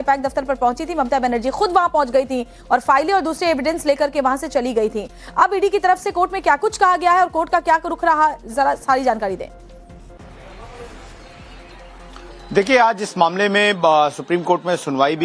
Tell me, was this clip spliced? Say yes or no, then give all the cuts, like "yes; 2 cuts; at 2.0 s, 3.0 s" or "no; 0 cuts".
no; 0 cuts